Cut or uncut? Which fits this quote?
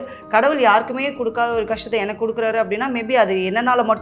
uncut